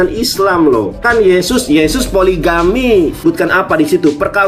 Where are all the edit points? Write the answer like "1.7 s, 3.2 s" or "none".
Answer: 1.0 s, 3.2 s